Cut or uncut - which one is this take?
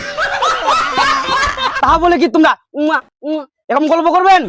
cut